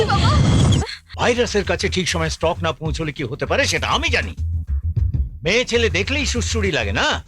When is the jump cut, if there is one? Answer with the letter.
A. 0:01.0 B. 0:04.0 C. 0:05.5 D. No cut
A